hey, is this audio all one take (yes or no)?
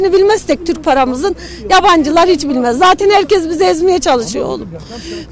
yes